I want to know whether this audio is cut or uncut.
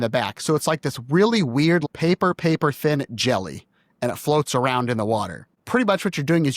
cut